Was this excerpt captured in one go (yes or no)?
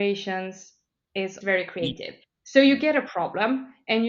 no